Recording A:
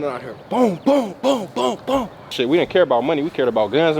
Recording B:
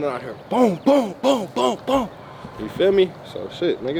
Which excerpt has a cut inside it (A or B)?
A